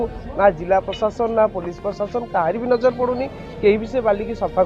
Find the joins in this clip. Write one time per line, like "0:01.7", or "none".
none

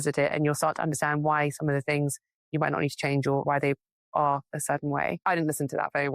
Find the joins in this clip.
0:03.4
0:05.2

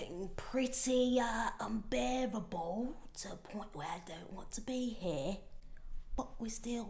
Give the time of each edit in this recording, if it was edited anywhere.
none

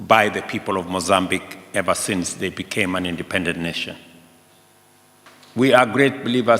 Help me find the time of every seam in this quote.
0:05.3

